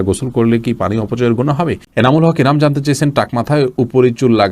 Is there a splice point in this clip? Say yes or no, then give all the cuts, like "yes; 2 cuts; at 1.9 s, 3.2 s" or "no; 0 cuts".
yes; 1 cut; at 1.8 s